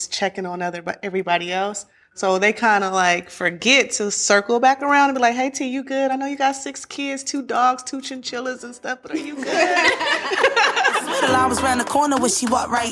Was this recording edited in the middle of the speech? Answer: yes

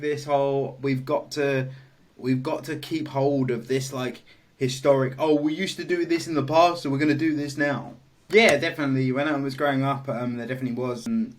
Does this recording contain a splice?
yes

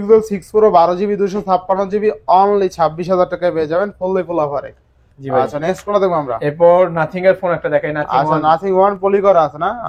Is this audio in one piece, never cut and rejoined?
yes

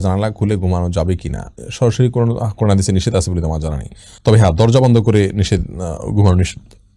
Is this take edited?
no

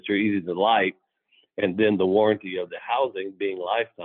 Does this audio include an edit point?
no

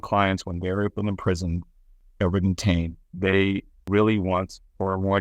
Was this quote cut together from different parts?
yes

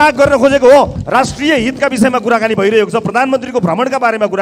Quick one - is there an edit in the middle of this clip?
yes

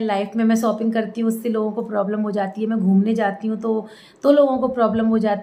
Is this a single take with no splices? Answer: yes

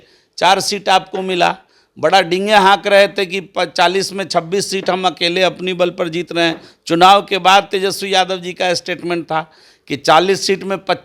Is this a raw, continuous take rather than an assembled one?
yes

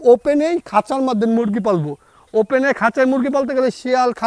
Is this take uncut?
yes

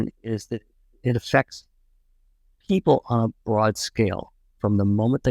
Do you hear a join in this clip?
no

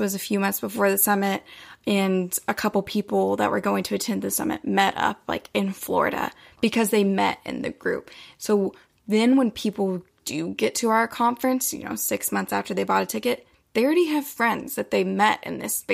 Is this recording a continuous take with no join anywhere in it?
yes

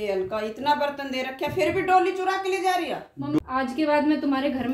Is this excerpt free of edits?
no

